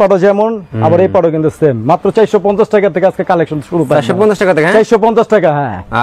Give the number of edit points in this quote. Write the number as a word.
zero